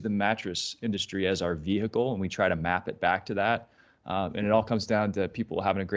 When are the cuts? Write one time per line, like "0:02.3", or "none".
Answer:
none